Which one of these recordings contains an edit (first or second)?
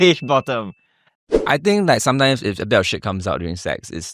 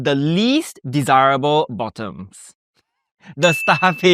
first